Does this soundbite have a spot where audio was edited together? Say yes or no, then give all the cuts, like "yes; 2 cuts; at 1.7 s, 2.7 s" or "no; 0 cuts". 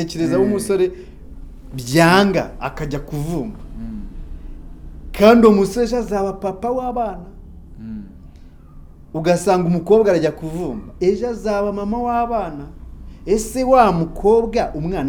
no; 0 cuts